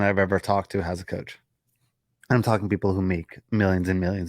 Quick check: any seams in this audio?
yes; 1 cut; at 2.1 s

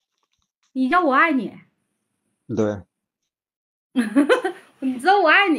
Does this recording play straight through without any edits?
yes; 0 cuts

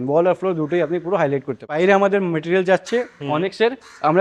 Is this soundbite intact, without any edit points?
no; 1 cut; at 1.8 s

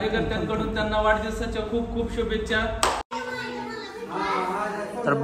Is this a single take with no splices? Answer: no; 1 cut; at 3.1 s

